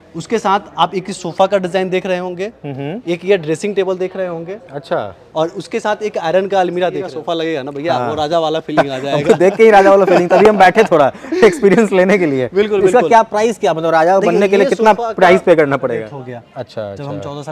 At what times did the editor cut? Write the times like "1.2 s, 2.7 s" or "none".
7.1 s, 16.1 s